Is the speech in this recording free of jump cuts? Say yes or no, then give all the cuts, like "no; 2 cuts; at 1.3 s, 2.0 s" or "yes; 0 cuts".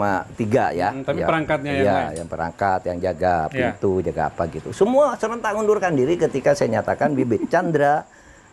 yes; 0 cuts